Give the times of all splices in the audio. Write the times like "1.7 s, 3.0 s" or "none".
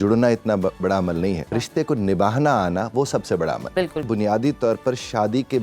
1.5 s, 4.1 s